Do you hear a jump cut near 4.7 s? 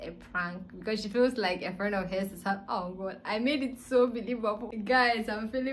yes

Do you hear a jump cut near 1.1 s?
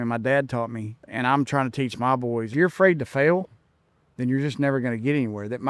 yes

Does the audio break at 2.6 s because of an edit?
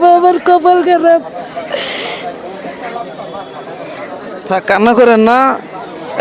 no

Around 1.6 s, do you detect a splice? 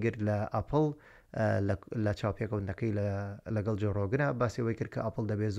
no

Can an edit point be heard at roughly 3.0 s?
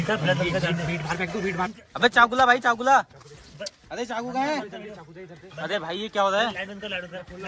no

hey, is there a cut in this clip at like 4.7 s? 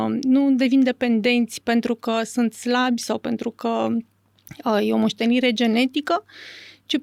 no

